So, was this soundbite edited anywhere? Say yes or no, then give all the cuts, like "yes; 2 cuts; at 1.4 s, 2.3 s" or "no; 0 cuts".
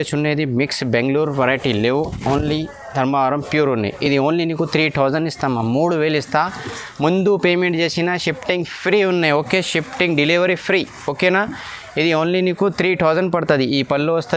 no; 0 cuts